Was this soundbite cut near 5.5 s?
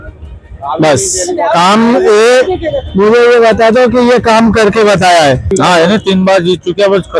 yes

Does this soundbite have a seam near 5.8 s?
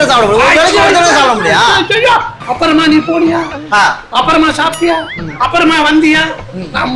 no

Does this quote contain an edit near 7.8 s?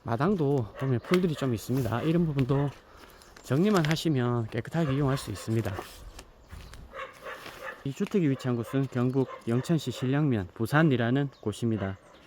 yes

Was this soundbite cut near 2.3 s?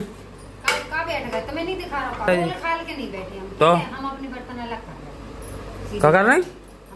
yes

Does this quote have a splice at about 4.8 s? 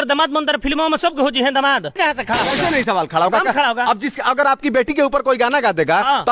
no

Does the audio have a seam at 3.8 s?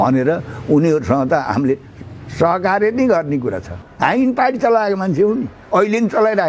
yes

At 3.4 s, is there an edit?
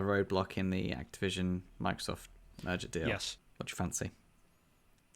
yes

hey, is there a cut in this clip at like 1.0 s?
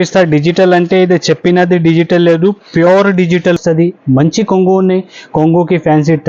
no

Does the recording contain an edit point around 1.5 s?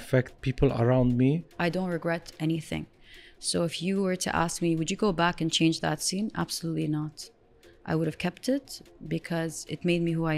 yes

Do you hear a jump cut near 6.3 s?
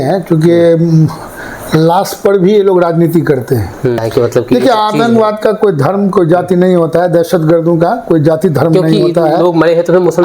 no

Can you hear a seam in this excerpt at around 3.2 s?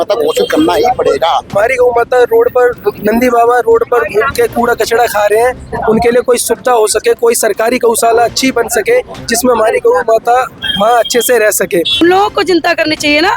no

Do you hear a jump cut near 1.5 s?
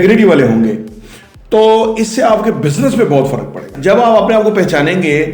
no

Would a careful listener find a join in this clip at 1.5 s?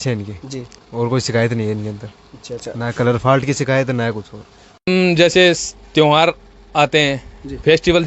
no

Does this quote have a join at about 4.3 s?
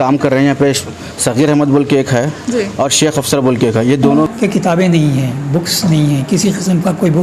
yes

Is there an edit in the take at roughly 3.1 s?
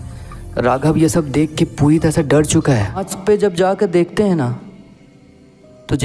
yes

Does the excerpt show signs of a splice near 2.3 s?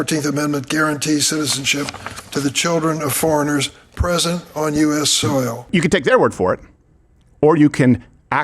no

